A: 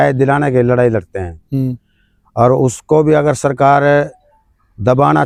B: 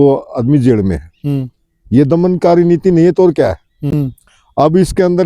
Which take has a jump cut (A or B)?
B